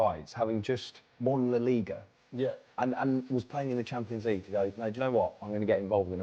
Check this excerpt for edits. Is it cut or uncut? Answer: uncut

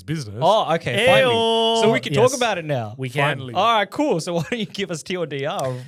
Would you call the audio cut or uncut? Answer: uncut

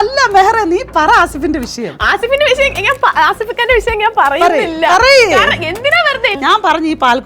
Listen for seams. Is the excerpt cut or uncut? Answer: cut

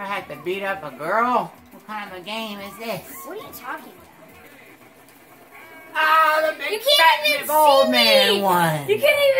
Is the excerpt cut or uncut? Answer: cut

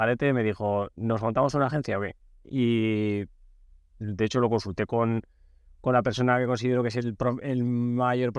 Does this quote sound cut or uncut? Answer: uncut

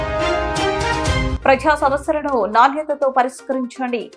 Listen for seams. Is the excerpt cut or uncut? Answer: uncut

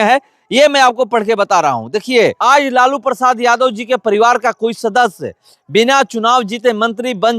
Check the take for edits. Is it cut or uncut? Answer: cut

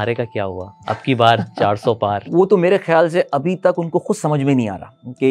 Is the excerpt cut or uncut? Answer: cut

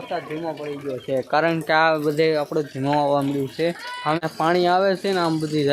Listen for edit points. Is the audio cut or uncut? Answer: cut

